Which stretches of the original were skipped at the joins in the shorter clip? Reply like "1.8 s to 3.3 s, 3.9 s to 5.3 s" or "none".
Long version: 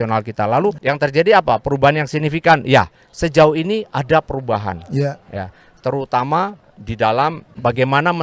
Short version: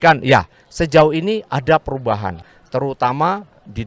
4.8 s to 5.5 s